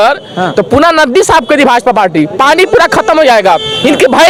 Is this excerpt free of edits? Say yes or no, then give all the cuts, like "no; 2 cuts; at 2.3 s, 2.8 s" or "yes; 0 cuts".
yes; 0 cuts